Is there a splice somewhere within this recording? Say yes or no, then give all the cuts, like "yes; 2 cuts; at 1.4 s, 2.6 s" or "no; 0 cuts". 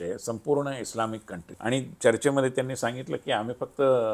yes; 1 cut; at 1.5 s